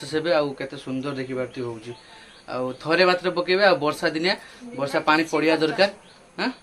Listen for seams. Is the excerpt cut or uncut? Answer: uncut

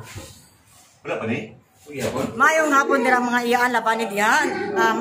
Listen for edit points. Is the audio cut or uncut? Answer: cut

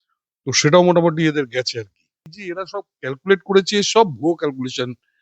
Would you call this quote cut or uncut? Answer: cut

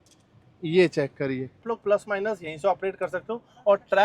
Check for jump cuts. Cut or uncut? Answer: cut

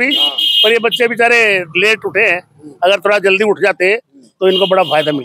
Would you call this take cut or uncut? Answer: uncut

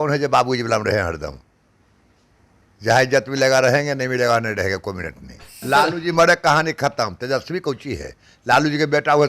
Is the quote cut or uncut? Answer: cut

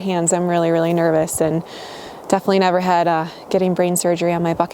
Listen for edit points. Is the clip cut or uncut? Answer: uncut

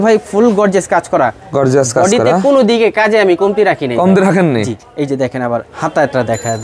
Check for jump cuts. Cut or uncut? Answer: uncut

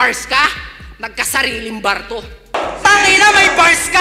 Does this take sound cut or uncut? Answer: cut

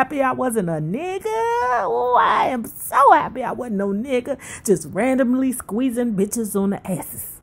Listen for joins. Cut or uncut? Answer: uncut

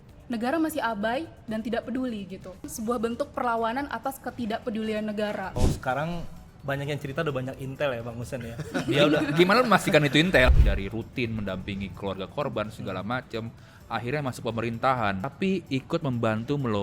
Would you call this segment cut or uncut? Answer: cut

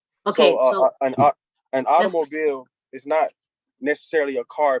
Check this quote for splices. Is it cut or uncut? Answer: uncut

